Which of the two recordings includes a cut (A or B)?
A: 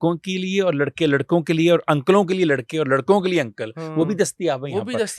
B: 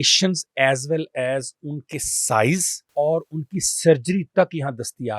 B